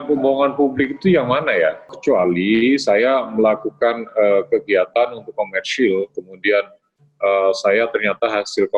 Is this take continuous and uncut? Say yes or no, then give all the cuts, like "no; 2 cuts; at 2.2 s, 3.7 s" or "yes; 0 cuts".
no; 1 cut; at 1.9 s